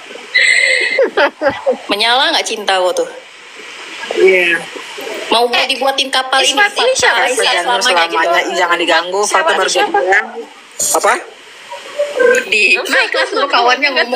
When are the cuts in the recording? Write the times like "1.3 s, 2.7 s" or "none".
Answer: 12.5 s